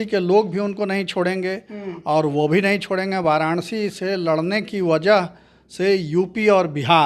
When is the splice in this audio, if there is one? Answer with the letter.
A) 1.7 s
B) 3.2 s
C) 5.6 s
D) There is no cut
D